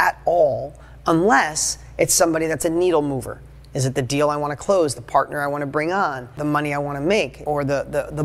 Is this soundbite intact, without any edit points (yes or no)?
no